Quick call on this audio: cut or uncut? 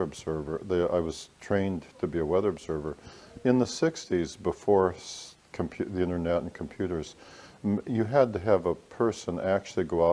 cut